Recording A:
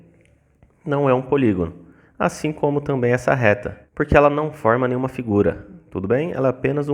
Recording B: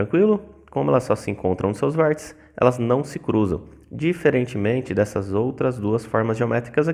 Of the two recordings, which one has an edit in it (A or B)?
A